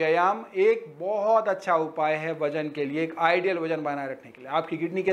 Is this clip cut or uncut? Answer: uncut